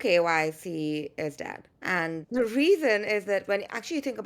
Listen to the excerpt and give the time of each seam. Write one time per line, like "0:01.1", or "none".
0:02.2